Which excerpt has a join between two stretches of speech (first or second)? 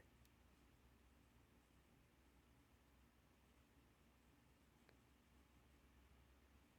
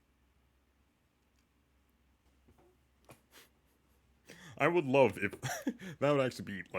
second